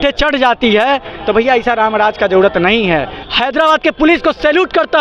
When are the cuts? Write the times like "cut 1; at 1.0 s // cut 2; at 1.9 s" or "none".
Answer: cut 1; at 3.2 s